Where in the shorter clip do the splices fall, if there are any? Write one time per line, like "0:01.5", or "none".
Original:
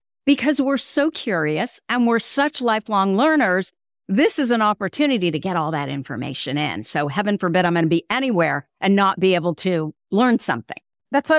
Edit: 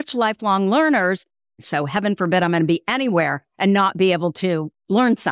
0:01.5